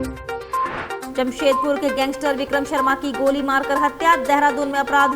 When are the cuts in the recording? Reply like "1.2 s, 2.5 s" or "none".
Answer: 1.0 s